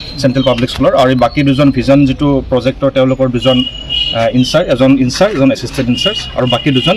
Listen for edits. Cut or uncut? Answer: uncut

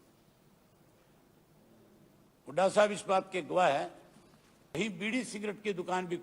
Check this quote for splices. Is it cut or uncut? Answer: cut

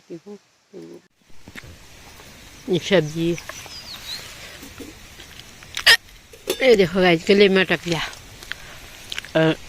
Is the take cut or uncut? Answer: cut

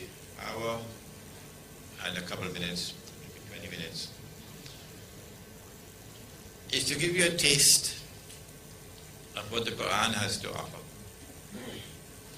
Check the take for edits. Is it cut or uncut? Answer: cut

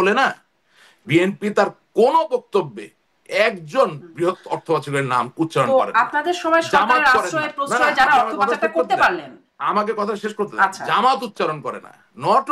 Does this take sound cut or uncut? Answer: uncut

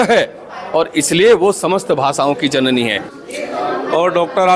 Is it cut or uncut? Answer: cut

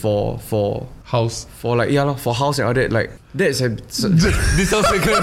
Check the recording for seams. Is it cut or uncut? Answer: cut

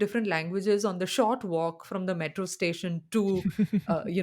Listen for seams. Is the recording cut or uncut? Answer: uncut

